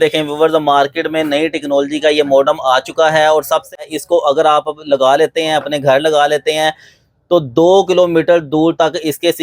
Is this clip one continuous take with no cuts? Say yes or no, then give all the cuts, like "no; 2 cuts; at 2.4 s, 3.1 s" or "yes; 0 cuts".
no; 1 cut; at 3.8 s